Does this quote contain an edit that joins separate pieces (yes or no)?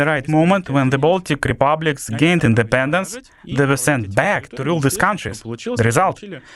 no